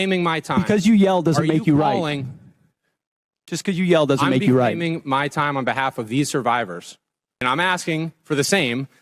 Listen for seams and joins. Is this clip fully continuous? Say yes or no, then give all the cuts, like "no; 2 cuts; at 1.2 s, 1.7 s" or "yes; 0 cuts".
no; 1 cut; at 7.4 s